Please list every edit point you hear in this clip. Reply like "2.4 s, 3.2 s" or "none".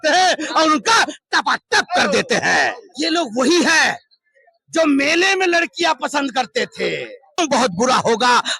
2.8 s, 7.4 s